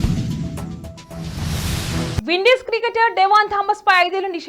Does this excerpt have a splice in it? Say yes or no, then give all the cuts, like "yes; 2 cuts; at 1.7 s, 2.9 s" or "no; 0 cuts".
yes; 1 cut; at 2.1 s